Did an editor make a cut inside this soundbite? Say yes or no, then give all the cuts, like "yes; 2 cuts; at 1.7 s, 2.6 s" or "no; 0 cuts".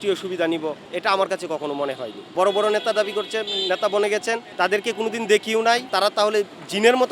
yes; 2 cuts; at 2.2 s, 5.8 s